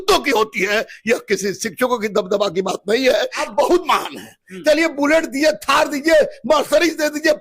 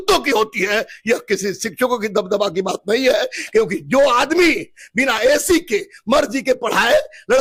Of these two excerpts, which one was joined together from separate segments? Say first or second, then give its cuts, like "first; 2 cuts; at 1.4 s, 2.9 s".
first; 1 cut; at 3.4 s